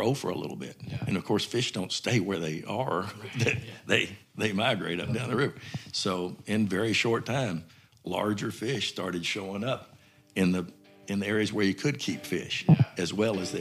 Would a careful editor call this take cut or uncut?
uncut